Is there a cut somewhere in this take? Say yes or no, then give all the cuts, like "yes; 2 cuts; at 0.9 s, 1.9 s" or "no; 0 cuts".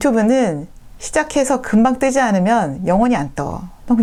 no; 0 cuts